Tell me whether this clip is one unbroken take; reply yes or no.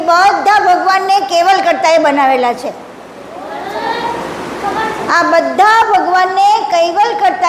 yes